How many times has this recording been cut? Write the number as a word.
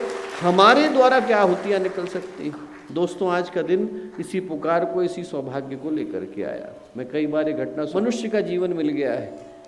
one